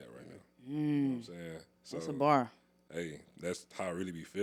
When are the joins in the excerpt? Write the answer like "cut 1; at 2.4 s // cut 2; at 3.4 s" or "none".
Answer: none